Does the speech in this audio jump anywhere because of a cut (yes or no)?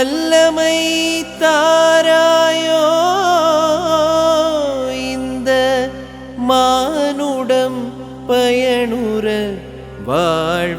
no